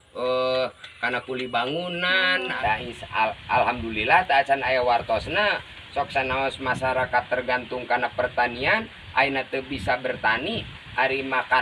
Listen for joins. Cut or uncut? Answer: cut